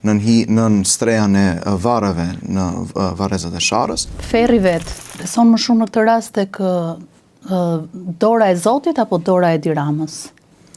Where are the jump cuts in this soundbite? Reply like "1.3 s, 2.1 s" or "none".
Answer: 4.1 s, 4.9 s